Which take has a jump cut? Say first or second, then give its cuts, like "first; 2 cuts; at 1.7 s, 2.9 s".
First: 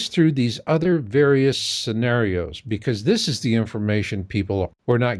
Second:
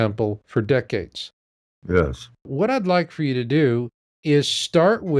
first; 1 cut; at 4.2 s